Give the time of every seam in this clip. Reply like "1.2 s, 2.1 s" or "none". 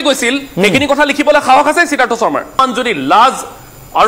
2.6 s